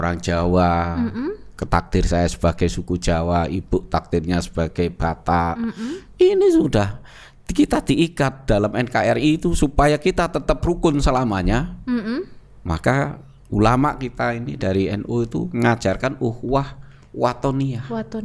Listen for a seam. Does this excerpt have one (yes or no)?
no